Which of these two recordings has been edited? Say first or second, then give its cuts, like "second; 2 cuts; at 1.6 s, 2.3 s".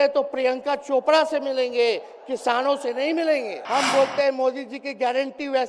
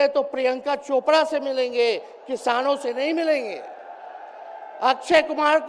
first; 1 cut; at 3.6 s